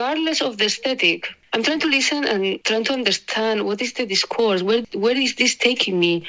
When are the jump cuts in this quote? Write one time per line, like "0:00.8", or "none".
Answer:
0:04.9